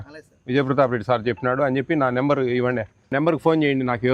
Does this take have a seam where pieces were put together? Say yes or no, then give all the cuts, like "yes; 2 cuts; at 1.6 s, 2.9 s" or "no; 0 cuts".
yes; 1 cut; at 3.1 s